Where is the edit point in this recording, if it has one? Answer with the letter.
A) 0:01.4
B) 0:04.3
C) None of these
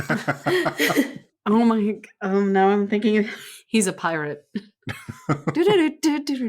A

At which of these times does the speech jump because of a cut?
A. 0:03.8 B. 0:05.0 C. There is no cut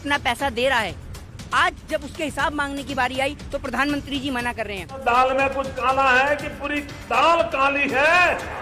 B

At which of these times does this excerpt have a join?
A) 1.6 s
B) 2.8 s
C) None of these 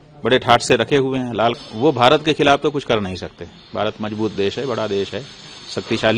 A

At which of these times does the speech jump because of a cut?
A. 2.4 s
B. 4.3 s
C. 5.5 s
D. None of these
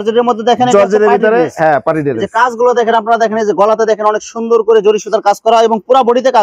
D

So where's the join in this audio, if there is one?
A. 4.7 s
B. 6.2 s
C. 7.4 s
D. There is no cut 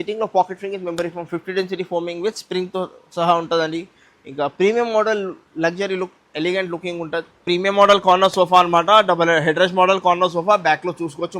C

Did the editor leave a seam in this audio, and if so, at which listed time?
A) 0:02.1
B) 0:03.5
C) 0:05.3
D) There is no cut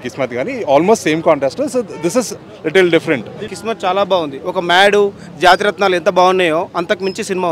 B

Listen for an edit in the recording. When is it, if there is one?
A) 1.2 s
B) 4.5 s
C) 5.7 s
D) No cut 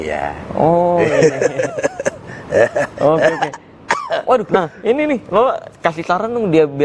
B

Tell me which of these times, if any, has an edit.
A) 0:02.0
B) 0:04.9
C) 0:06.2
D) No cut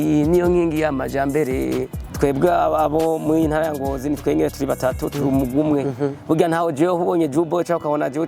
A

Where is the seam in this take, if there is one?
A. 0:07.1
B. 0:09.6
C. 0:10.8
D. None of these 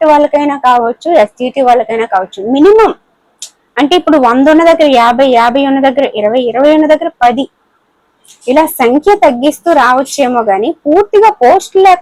D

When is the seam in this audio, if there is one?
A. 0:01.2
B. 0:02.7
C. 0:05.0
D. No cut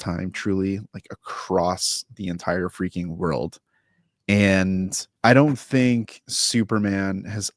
C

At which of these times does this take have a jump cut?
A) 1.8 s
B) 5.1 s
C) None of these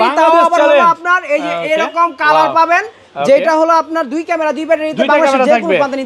C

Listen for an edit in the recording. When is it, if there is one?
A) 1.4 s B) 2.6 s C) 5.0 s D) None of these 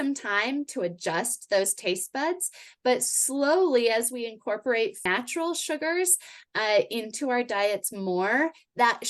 C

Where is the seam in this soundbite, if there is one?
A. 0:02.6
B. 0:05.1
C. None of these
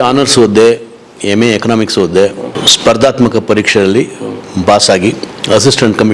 A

